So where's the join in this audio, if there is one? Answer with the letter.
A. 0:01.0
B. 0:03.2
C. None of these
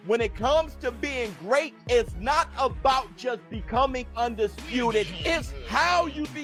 C